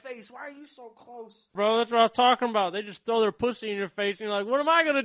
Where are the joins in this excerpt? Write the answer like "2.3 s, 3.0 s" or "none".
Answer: 1.5 s